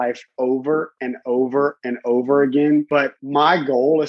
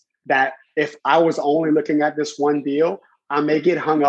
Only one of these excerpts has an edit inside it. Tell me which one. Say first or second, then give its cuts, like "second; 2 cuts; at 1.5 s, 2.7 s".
first; 1 cut; at 3.2 s